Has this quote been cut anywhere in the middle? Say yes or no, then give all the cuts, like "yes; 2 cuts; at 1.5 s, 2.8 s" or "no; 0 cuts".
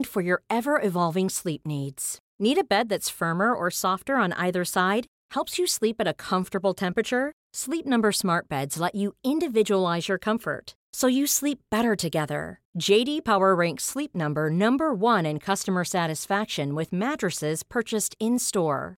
no; 0 cuts